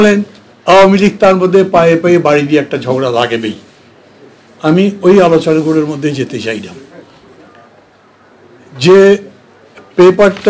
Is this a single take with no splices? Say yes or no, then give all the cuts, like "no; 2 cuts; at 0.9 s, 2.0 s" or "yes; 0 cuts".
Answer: yes; 0 cuts